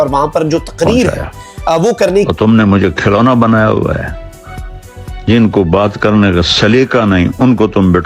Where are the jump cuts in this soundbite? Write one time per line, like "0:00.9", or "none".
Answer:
0:02.3